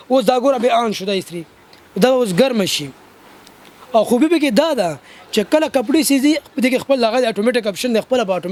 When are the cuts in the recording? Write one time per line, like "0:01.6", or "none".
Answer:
none